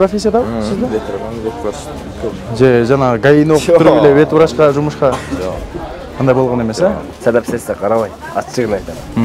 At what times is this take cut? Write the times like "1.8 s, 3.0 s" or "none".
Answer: 7.1 s